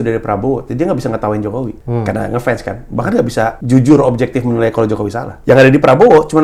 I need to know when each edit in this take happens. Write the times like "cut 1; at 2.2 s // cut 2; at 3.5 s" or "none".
cut 1; at 1.8 s // cut 2; at 3.6 s // cut 3; at 5.3 s